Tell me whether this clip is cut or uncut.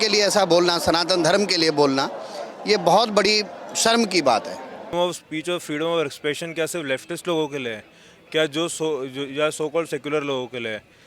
cut